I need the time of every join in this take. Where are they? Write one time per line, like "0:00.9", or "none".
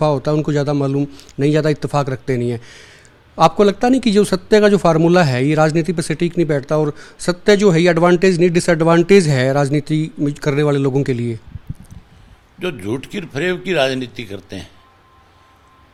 none